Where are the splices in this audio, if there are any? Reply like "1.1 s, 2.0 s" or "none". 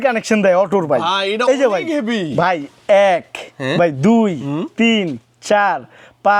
none

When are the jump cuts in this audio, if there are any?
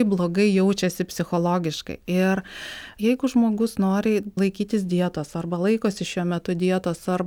2.9 s, 4.4 s

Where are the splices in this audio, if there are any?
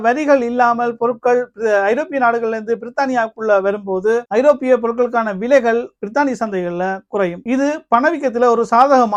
none

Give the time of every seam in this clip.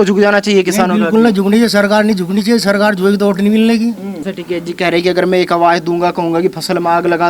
4.3 s

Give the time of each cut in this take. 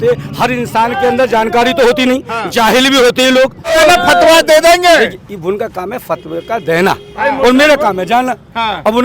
3.7 s

